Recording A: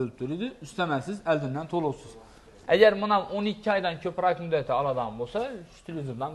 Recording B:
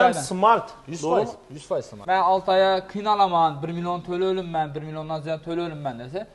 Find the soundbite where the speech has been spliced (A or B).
B